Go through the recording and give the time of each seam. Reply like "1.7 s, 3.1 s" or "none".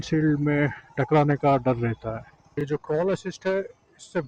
2.6 s